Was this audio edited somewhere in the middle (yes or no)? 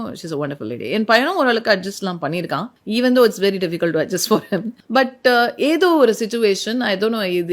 yes